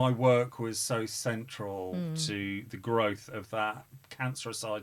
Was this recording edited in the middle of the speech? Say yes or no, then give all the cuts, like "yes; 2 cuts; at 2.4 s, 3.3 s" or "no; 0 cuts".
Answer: no; 0 cuts